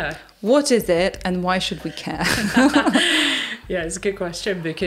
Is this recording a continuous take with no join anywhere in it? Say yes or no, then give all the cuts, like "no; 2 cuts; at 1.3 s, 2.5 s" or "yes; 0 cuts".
yes; 0 cuts